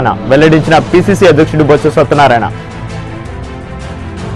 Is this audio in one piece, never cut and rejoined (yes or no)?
yes